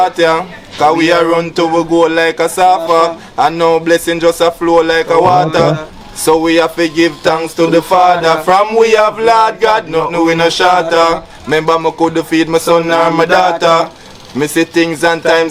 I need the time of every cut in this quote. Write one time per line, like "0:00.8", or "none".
none